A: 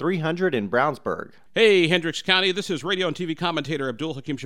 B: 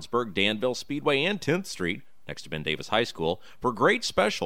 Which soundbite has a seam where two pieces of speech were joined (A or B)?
A